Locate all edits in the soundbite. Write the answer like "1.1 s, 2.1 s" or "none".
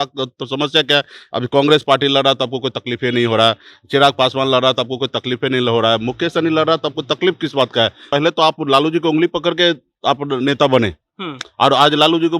8.0 s